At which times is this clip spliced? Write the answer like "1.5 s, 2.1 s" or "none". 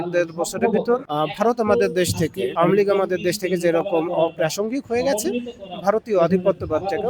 1.1 s, 2.5 s